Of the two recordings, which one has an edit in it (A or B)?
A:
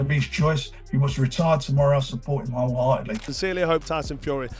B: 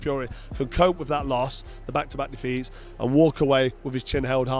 A